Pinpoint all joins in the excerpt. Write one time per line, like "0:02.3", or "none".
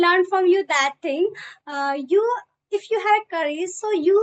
none